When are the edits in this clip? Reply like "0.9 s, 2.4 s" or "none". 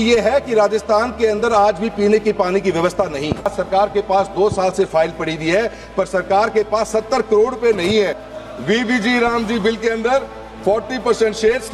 3.5 s, 8.2 s

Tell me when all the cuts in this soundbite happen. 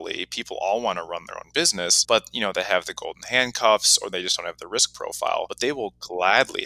2.0 s, 5.5 s

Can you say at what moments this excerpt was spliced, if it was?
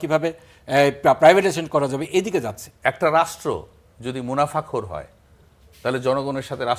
2.6 s

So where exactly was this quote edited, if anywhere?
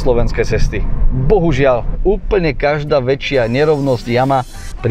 2.0 s

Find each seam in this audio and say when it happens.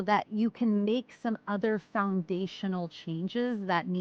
none

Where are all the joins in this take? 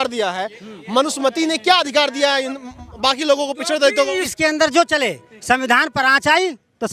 4.3 s

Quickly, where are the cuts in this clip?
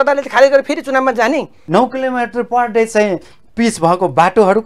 1.5 s

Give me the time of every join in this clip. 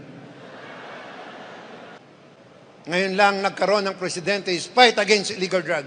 2.0 s

